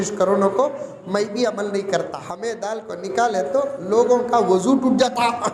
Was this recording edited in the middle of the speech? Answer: yes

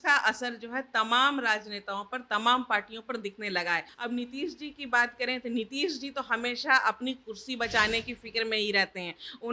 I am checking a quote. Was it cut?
yes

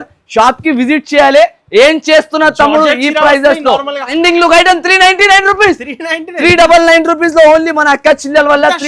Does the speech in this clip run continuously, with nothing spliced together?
no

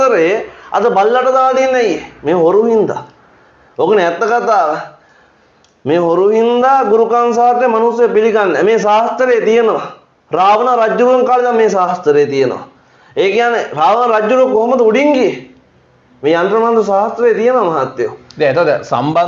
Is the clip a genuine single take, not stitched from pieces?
yes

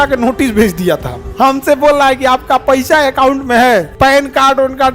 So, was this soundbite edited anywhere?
yes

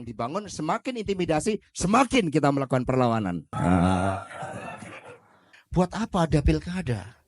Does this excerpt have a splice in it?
yes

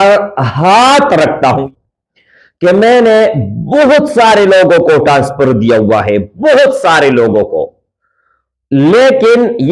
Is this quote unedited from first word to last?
no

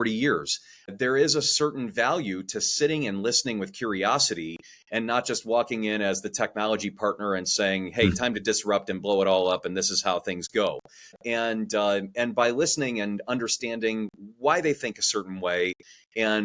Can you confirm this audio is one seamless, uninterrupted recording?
no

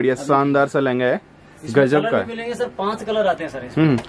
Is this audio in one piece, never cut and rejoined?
yes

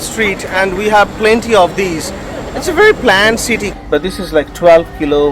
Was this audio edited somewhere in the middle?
yes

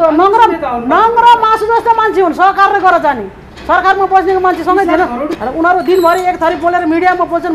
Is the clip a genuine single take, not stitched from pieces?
no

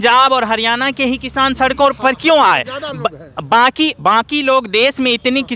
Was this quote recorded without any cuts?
yes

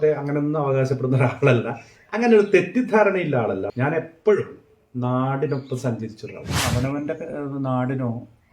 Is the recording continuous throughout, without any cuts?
no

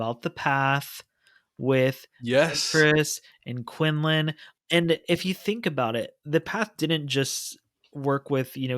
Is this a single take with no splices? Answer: no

